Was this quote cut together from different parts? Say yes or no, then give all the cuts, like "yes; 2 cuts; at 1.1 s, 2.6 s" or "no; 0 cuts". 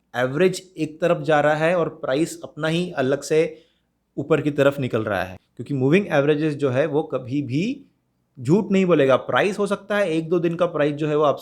yes; 1 cut; at 5.4 s